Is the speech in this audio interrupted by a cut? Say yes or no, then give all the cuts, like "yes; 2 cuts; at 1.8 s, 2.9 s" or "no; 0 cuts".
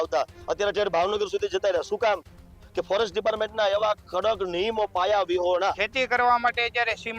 yes; 1 cut; at 5.8 s